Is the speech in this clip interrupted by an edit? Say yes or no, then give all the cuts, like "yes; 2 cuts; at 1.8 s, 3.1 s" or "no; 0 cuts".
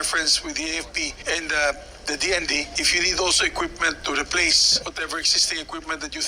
yes; 3 cuts; at 1.2 s, 2.8 s, 4.7 s